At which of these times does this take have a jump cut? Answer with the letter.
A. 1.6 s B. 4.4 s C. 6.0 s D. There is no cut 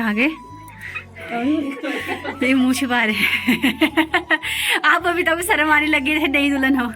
D